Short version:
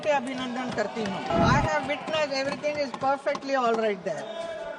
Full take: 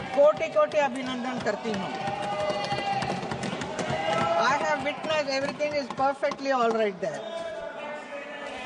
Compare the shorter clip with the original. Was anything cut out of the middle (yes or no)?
yes